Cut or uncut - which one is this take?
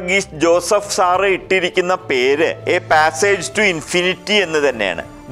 cut